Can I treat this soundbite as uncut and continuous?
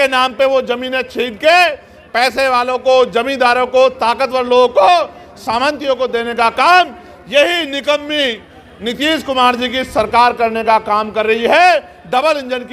yes; 0 cuts

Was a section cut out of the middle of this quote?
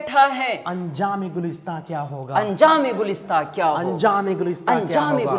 no; 0 cuts

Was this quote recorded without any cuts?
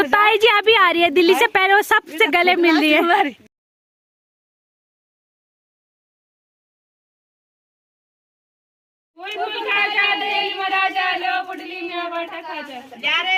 yes; 0 cuts

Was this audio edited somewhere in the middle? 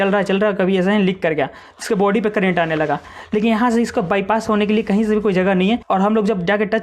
yes; 1 cut; at 5.8 s

